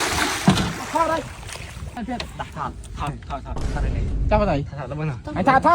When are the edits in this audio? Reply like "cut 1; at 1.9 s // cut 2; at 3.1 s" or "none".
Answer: cut 1; at 1.9 s